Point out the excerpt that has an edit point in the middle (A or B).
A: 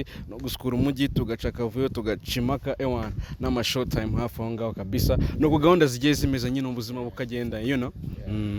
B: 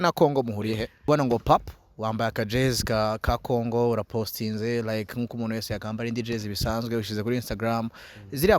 B